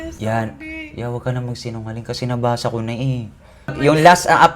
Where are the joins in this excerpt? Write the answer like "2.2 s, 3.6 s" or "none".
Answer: 3.4 s